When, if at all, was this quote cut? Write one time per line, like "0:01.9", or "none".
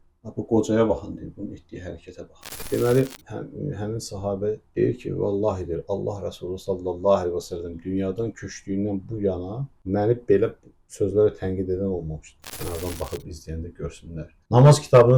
0:02.5
0:12.4